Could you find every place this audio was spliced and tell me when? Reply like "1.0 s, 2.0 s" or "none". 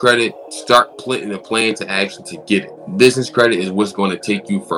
0.9 s, 2.8 s